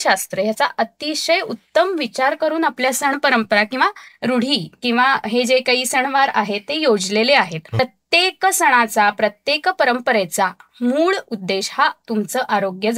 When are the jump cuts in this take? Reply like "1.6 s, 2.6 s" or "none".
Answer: 7.8 s